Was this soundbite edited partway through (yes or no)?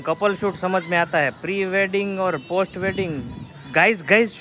no